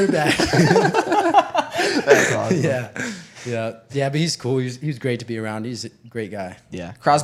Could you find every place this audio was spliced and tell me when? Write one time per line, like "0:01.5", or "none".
none